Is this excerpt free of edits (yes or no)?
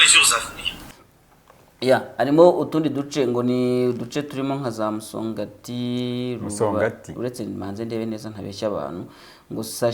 no